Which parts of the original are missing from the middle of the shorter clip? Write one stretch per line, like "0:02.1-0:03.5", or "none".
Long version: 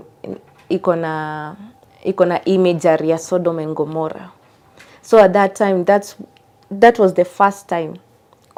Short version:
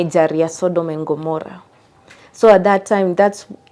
none